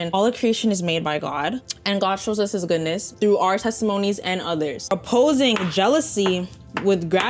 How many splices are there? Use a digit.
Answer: 1